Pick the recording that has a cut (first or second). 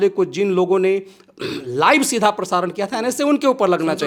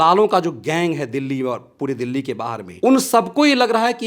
second